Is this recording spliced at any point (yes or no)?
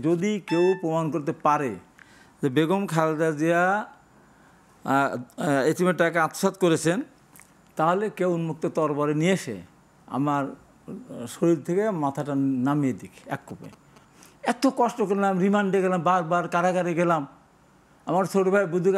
yes